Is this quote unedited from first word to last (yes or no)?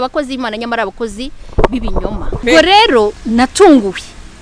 no